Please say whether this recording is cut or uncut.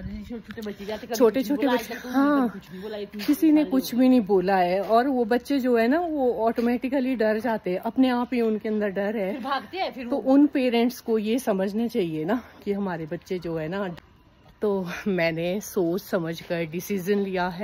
cut